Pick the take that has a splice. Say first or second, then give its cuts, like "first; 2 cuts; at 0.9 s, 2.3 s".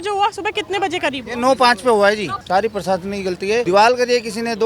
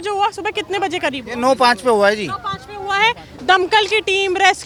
first; 2 cuts; at 2.3 s, 3.6 s